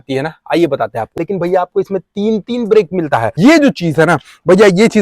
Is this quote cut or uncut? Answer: cut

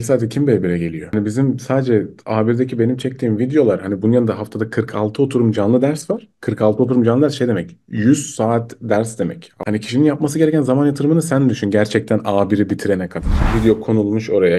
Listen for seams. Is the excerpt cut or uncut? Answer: cut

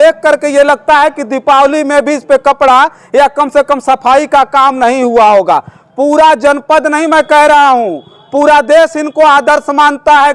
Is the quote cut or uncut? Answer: uncut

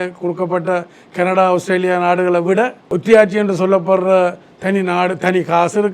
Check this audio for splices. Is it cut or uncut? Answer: cut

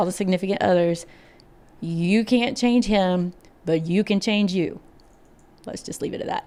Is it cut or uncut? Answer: uncut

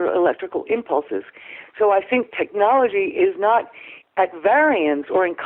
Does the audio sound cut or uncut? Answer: uncut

